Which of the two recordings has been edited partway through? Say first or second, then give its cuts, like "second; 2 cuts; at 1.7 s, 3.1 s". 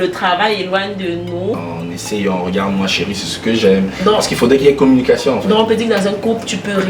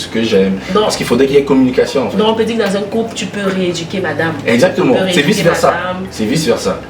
first; 1 cut; at 1.7 s